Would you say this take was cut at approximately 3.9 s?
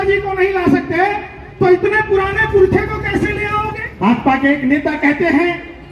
yes; 1 cut; at 3.9 s

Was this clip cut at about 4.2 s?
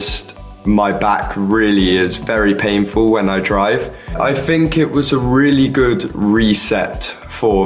yes; 1 cut; at 4.2 s

